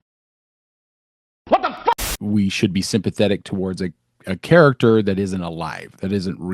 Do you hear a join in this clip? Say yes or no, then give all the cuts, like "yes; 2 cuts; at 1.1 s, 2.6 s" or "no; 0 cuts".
yes; 1 cut; at 2.1 s